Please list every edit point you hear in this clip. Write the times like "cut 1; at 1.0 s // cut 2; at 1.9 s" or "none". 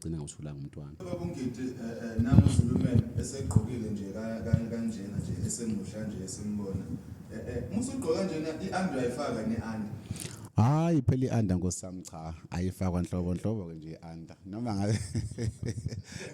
cut 1; at 1.0 s